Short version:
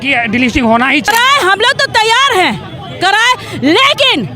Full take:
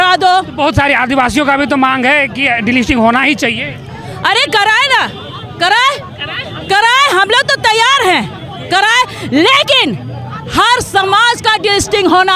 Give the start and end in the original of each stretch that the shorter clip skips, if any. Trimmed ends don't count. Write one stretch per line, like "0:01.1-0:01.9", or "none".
0:03.4-0:06.8